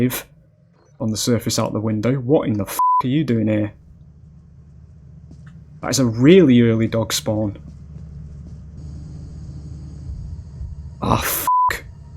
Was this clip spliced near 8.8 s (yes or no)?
yes